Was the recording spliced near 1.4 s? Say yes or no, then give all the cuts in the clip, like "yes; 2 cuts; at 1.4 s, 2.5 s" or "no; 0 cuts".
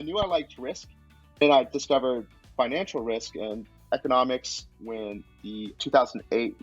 yes; 1 cut; at 1.4 s